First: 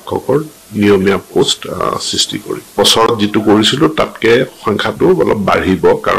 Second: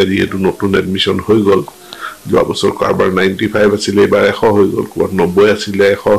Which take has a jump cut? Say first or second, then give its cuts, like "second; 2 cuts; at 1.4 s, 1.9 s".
first; 1 cut; at 3.1 s